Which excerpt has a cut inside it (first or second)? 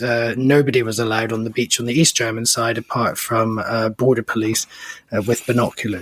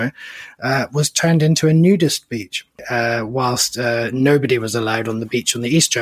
second